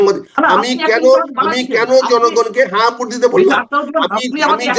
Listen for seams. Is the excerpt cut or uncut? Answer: uncut